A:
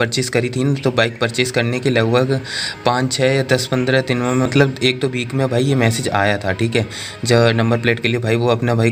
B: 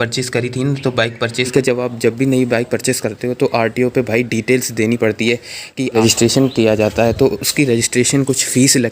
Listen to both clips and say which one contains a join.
B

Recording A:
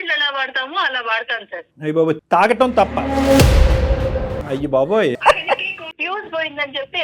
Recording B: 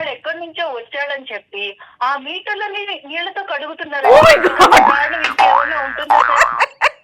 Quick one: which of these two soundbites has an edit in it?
A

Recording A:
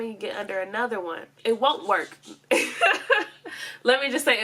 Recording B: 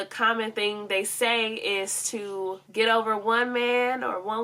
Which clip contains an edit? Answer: A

